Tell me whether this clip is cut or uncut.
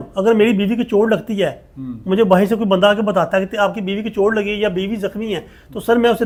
uncut